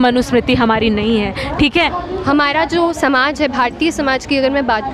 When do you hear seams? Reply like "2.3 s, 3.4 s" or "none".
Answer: 2.0 s